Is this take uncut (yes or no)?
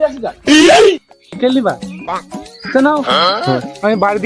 no